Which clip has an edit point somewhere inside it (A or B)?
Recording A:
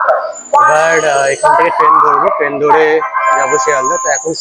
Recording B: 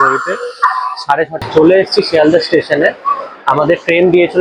B